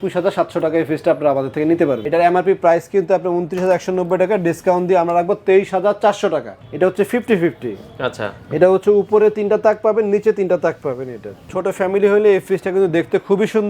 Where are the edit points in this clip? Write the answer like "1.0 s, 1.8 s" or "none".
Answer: 2.0 s, 6.6 s, 11.5 s